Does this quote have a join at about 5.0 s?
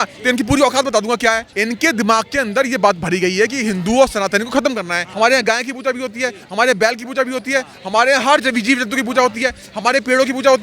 yes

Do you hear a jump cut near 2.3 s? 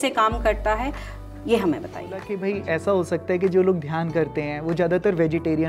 yes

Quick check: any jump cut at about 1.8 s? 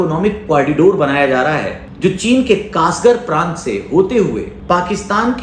yes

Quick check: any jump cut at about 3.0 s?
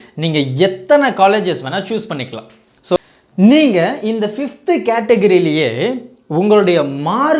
yes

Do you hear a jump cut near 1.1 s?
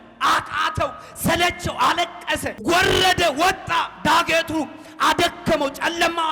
no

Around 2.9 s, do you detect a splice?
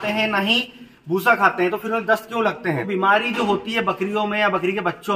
yes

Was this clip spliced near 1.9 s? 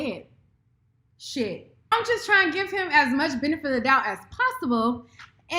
yes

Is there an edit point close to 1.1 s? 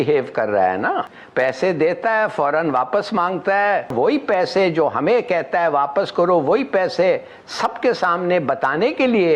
yes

